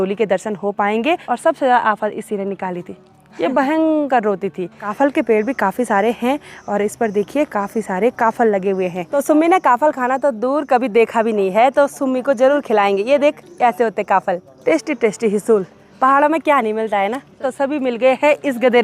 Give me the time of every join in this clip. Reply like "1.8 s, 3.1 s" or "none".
1.2 s, 4.8 s, 9.1 s, 14.5 s, 17.5 s